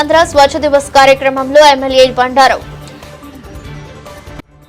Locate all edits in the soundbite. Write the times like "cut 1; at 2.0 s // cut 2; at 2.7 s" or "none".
cut 1; at 2.6 s